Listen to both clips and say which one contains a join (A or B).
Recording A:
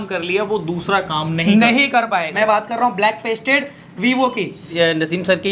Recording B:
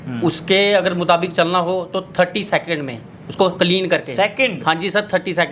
A